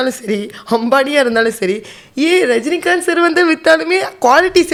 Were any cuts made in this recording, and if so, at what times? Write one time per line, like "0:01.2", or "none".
none